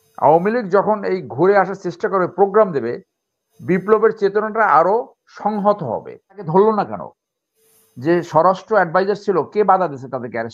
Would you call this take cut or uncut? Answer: cut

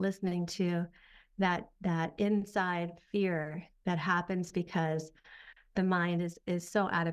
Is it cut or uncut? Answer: uncut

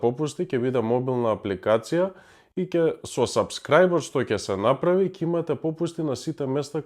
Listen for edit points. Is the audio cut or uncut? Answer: uncut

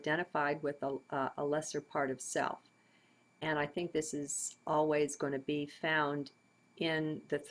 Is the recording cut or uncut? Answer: uncut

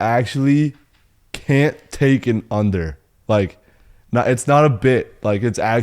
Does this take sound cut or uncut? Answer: uncut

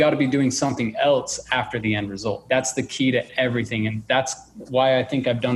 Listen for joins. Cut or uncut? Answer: cut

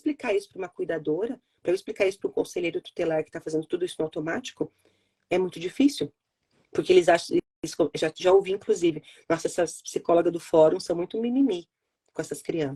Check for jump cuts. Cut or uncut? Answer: uncut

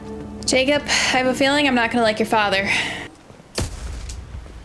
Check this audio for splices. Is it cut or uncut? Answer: cut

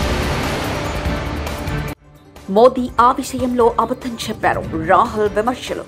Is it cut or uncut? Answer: cut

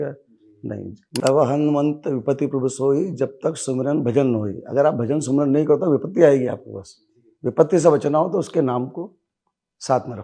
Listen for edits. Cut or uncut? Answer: cut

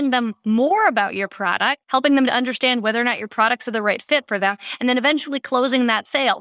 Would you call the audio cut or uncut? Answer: cut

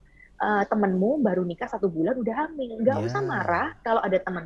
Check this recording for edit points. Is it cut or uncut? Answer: uncut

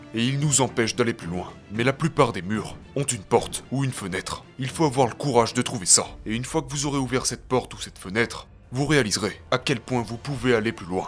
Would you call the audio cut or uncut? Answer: uncut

